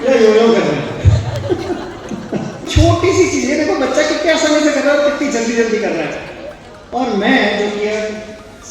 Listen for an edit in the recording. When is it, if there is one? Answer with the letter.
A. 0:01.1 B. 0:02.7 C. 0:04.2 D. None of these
B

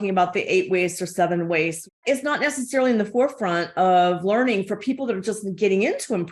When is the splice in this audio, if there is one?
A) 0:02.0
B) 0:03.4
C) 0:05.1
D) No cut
A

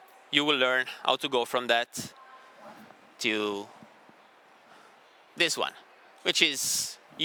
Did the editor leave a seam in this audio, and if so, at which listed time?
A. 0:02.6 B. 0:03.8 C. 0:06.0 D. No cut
D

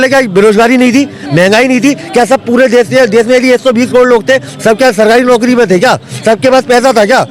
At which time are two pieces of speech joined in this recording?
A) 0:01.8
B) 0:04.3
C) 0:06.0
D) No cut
D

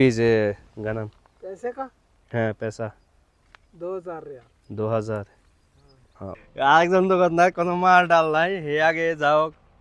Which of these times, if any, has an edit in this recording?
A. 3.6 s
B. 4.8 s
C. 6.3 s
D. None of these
C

